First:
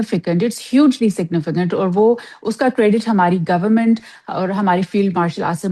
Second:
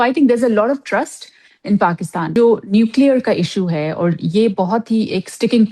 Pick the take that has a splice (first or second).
second